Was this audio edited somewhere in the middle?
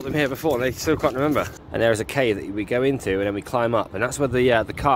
yes; 1 cut; at 1.6 s

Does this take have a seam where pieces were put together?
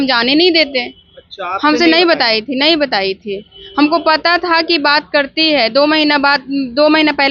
no; 0 cuts

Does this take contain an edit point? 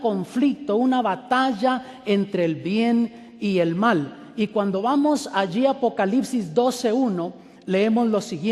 no; 0 cuts

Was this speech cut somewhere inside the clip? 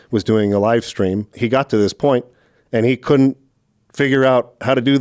yes; 1 cut; at 1.3 s

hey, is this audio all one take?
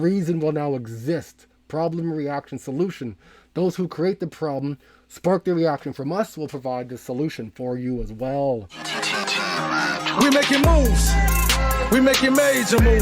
no; 1 cut; at 8.8 s

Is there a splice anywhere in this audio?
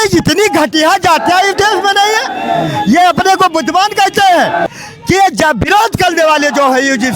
yes; 1 cut; at 4.7 s

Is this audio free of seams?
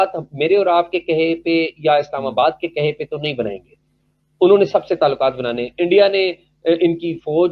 yes; 0 cuts

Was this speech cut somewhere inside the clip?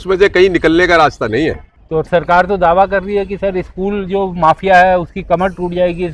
yes; 1 cut; at 1.7 s

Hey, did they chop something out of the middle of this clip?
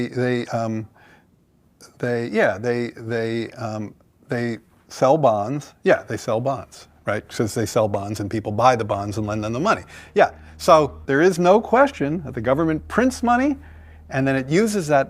yes; 1 cut; at 11.0 s

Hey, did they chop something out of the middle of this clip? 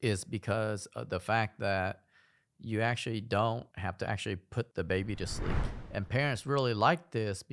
yes; 1 cut; at 5.6 s

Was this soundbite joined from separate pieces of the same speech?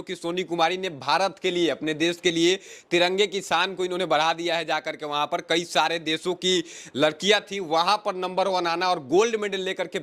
no; 0 cuts

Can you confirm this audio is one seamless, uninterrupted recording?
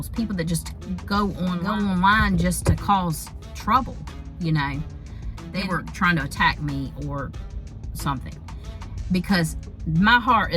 no; 2 cuts; at 1.6 s, 5.5 s

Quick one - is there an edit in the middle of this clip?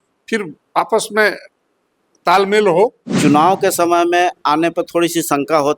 yes; 1 cut; at 3.1 s

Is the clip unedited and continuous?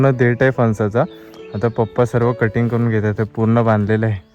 yes; 0 cuts

